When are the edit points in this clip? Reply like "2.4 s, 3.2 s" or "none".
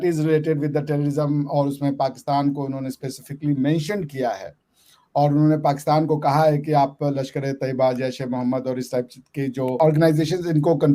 9.8 s